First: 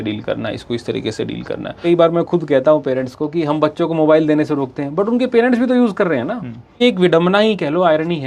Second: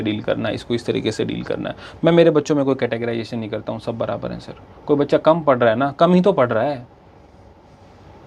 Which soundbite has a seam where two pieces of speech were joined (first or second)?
first